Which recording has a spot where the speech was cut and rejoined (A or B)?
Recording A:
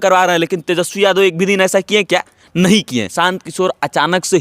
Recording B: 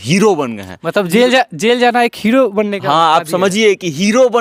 A